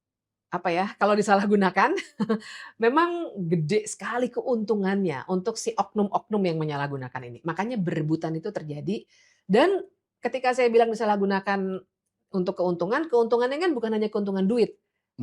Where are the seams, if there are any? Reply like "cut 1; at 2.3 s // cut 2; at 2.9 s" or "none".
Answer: none